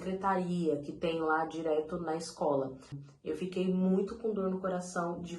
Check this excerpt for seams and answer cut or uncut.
cut